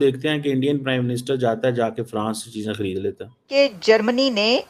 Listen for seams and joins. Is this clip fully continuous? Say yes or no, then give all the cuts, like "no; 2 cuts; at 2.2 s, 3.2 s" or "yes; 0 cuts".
no; 1 cut; at 3.5 s